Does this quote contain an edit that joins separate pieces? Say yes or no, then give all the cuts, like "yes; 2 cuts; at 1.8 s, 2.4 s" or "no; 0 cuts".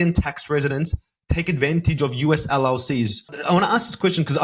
yes; 1 cut; at 3.3 s